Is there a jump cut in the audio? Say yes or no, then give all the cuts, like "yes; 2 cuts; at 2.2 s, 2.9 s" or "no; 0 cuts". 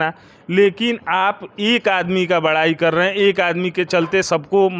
no; 0 cuts